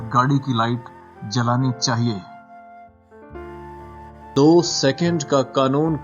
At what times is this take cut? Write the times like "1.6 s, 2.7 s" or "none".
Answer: 2.2 s, 4.3 s